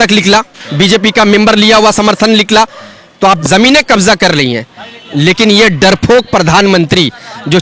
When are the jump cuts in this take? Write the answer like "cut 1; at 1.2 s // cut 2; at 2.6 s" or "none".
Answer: cut 1; at 3.4 s